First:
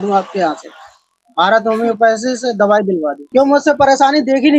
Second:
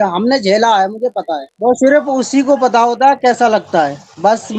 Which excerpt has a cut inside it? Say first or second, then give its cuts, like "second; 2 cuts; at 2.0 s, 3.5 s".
second; 1 cut; at 1.5 s